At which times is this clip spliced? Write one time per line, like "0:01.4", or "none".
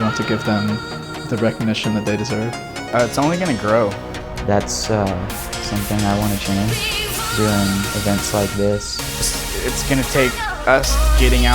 0:02.9
0:04.1
0:09.3

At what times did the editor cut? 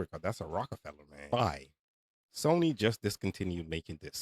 0:01.3

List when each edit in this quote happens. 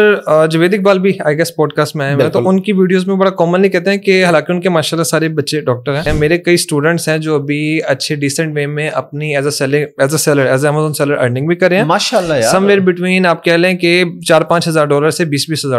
0:06.1

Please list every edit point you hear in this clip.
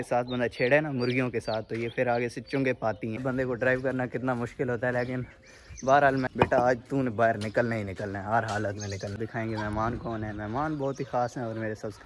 0:03.2
0:06.3
0:09.1

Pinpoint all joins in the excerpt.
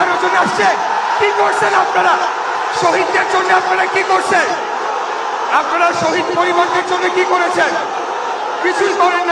none

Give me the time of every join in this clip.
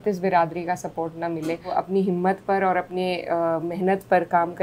0:01.7

